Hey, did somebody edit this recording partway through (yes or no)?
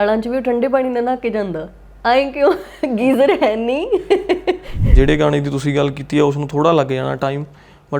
yes